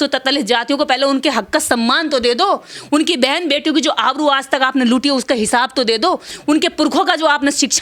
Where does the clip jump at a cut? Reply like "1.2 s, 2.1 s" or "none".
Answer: none